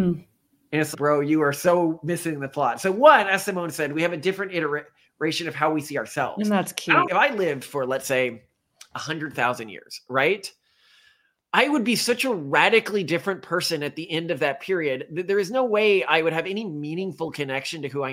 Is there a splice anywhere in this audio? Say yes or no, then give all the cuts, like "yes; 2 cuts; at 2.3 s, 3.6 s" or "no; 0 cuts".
yes; 1 cut; at 7.1 s